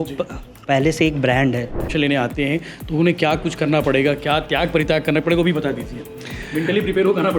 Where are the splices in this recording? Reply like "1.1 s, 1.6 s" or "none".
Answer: 1.9 s